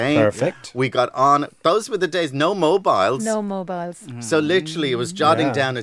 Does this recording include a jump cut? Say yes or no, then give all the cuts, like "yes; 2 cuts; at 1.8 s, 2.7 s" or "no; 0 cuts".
no; 0 cuts